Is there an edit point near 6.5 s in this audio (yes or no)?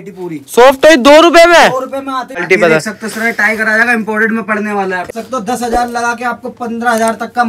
no